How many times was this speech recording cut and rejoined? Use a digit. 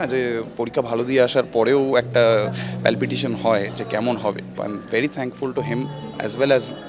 1